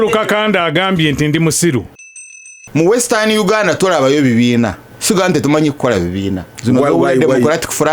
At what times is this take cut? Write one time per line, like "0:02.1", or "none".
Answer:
0:02.2
0:04.9
0:06.5